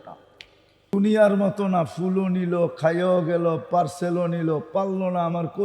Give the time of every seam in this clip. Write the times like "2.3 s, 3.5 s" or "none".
0.9 s